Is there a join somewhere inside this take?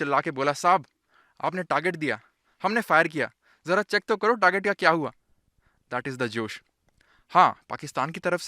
no; 0 cuts

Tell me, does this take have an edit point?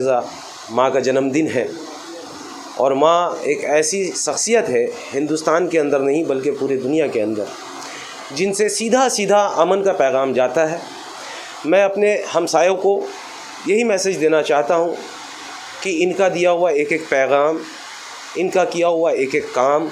no; 0 cuts

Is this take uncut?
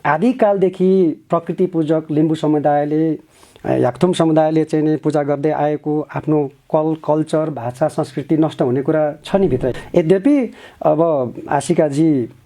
no; 1 cut; at 9.7 s

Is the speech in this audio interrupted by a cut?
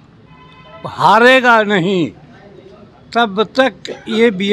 no; 0 cuts

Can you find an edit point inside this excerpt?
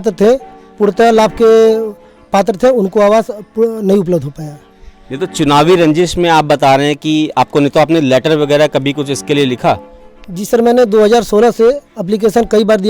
no; 0 cuts

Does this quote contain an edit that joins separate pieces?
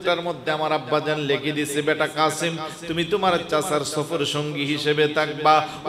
no; 0 cuts

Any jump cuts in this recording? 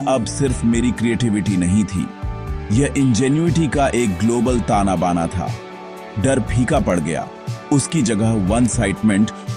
no; 0 cuts

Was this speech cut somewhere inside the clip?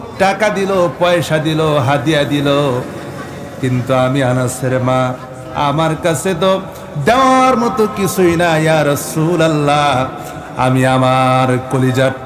no; 0 cuts

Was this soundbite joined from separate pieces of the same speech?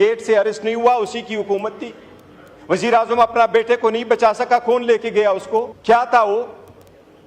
yes; 1 cut; at 5.7 s

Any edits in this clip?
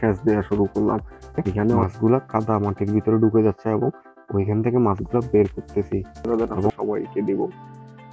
yes; 2 cuts; at 1.8 s, 6.3 s

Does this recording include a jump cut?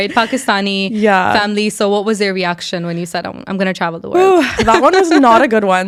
no; 0 cuts

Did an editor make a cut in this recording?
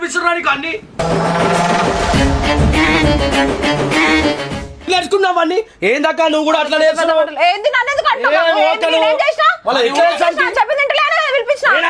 no; 0 cuts

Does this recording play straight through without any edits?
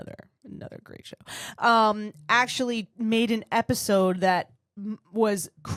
yes; 0 cuts

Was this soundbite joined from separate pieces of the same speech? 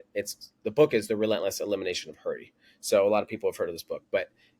no; 0 cuts

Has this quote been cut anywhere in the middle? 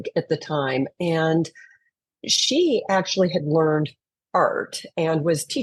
no; 0 cuts

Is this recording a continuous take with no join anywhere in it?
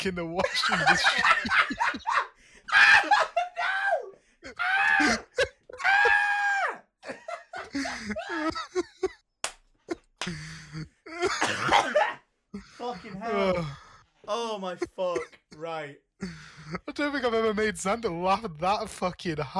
yes; 0 cuts

